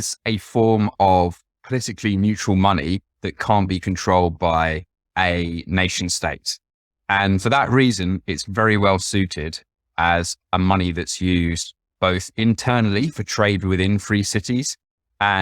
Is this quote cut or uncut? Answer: cut